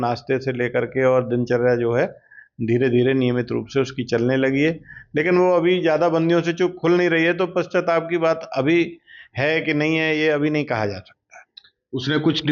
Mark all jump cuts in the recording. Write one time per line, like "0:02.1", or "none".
none